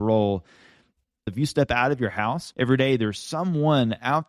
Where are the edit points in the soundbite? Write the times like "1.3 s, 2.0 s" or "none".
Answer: 1.3 s, 2.5 s